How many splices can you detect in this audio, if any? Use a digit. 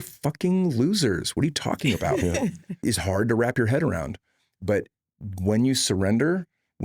1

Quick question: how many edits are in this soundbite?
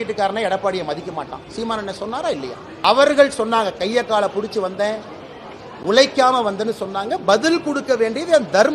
1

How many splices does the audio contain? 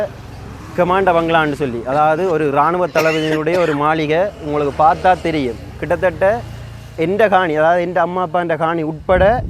0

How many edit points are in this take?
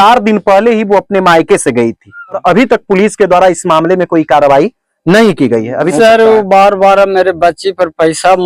2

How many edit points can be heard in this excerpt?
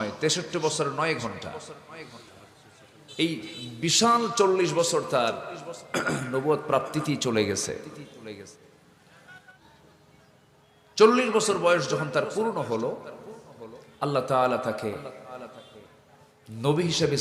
1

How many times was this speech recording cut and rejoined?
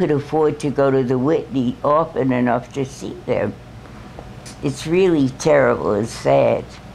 0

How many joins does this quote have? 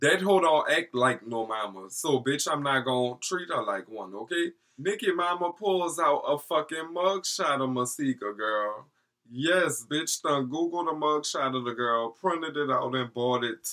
1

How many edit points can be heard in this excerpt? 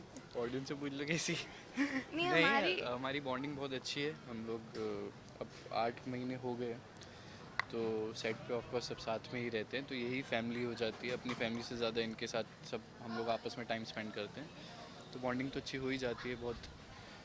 0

